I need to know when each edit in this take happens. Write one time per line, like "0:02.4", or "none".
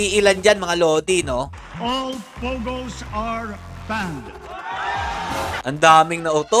0:05.6